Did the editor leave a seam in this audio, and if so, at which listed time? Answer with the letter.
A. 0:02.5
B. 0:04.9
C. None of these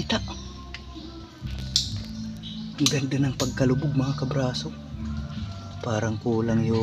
C